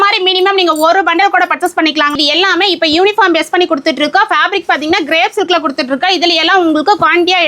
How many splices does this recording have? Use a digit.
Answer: 1